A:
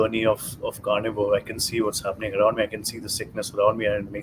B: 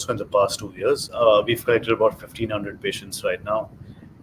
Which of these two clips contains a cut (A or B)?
B